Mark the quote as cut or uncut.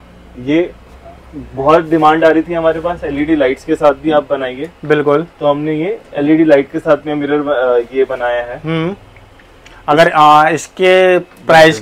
uncut